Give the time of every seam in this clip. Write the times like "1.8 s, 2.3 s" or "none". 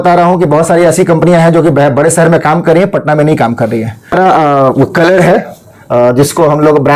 4.1 s